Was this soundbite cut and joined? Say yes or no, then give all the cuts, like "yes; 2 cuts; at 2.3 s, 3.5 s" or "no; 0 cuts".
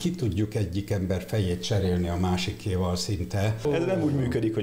yes; 1 cut; at 3.6 s